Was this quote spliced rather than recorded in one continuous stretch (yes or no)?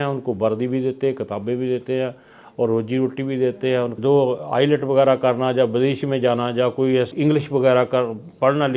yes